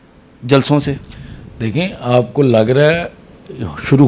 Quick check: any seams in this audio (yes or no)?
no